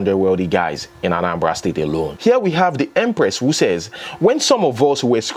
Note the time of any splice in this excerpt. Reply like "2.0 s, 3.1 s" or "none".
2.2 s